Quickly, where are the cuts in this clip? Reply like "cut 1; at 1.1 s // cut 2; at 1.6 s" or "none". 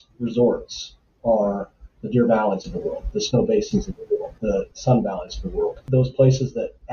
none